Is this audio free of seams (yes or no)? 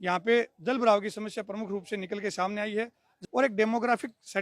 no